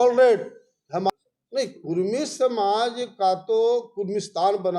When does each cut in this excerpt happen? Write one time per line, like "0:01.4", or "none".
0:01.1